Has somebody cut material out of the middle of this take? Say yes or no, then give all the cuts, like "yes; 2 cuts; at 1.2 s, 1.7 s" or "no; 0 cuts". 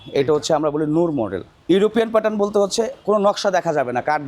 yes; 1 cut; at 1.5 s